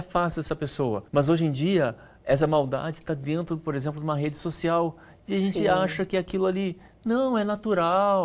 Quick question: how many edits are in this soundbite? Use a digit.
1